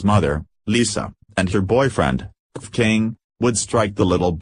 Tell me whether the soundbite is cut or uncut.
cut